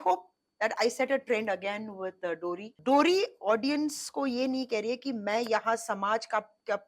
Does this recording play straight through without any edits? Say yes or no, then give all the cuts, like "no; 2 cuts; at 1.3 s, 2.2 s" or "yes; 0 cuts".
no; 1 cut; at 2.7 s